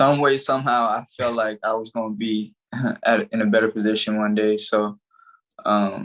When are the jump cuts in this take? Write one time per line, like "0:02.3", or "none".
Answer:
none